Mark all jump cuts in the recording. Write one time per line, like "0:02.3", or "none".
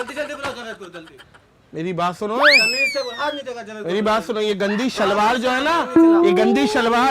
none